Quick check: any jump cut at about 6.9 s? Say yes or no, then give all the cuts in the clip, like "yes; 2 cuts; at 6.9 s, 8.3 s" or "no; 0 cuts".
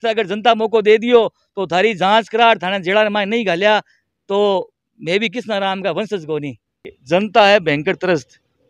yes; 1 cut; at 6.9 s